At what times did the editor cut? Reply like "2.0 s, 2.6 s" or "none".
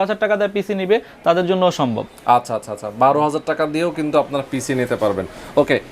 none